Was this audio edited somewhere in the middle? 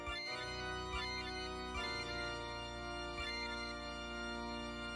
no; 0 cuts

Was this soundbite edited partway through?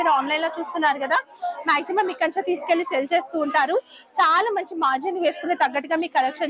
no; 0 cuts

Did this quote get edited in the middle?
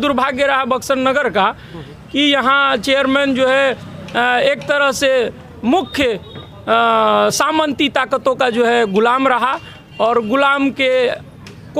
no; 0 cuts

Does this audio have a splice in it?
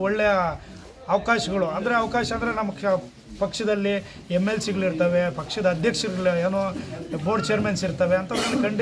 no; 0 cuts

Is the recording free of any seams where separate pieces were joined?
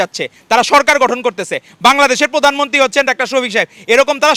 yes; 0 cuts

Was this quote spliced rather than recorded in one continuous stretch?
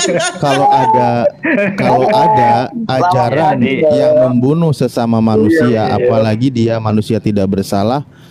no; 0 cuts

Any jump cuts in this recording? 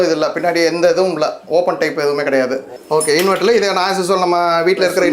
yes; 1 cut; at 2.7 s

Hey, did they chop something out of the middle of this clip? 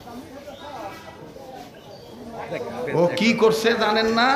yes; 1 cut; at 2.1 s

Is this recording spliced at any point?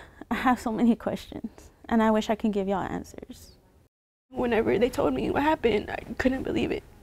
yes; 1 cut; at 4.3 s

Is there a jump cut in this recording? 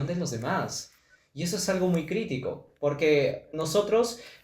yes; 1 cut; at 3.5 s

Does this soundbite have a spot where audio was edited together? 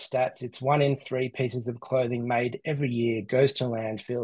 no; 0 cuts

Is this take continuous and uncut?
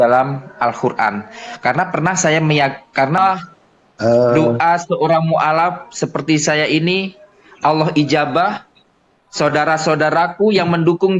no; 1 cut; at 3.2 s

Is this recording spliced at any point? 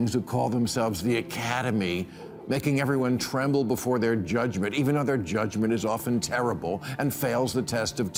no; 0 cuts

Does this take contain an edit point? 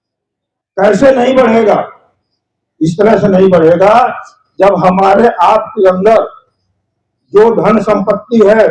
no; 0 cuts

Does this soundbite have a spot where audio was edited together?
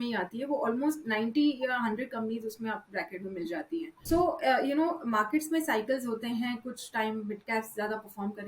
yes; 1 cut; at 3.9 s

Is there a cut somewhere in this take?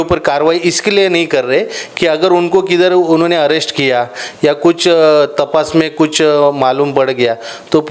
no; 0 cuts

